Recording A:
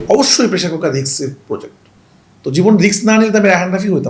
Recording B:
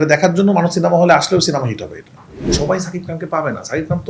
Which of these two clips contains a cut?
B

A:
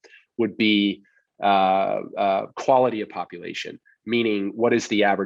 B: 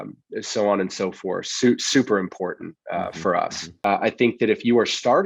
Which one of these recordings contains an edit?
B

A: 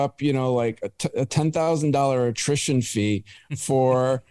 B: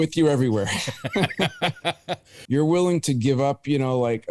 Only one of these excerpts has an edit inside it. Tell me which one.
B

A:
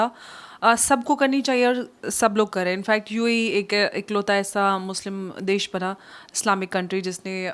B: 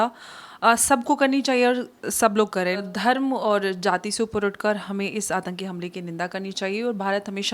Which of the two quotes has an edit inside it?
B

